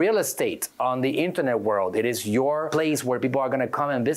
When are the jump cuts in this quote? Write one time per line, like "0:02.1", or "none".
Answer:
0:02.7